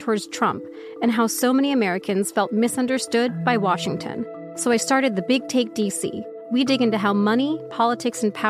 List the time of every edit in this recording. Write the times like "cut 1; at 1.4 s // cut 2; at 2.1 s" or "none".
cut 1; at 4.4 s // cut 2; at 6.3 s